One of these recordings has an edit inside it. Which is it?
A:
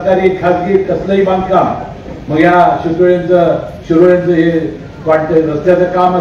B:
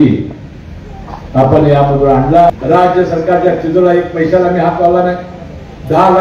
B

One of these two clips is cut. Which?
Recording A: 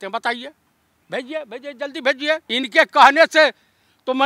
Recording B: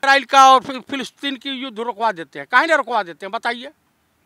A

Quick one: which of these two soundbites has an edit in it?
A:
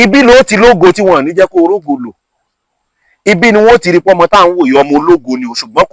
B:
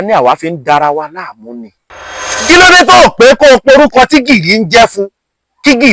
B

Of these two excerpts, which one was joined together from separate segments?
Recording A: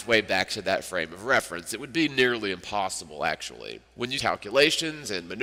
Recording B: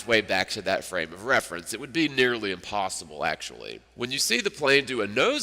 B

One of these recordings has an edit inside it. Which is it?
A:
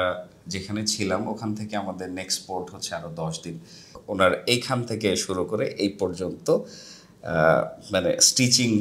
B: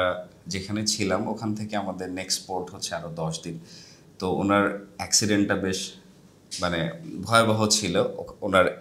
A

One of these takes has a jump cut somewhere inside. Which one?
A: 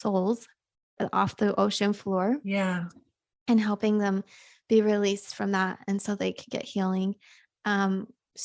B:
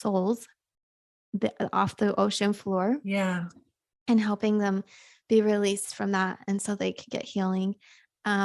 A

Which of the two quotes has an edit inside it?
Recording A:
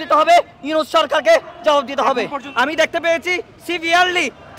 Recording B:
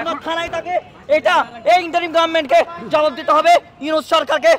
A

